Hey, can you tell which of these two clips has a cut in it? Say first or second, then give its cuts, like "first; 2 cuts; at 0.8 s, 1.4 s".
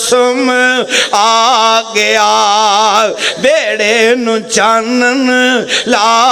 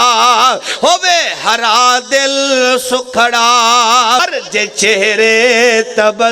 second; 1 cut; at 4.2 s